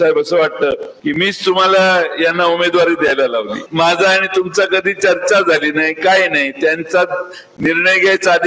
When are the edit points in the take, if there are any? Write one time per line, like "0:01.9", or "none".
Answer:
0:00.9
0:03.6

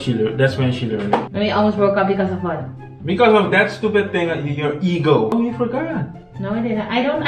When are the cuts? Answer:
0:01.3
0:05.3

